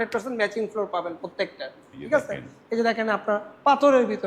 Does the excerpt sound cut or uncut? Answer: uncut